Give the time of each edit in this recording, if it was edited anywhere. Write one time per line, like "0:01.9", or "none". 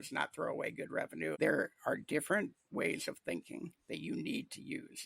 0:01.3